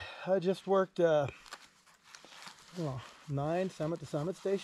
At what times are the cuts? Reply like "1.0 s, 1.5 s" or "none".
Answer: none